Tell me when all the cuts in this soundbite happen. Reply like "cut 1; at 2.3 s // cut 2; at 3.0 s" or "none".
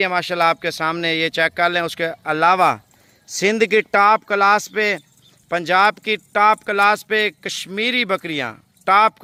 none